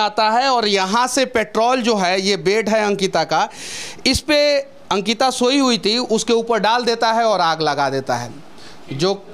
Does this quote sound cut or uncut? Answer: uncut